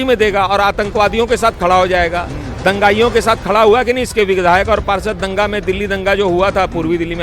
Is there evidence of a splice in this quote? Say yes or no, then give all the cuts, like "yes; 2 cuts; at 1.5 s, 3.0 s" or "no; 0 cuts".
no; 0 cuts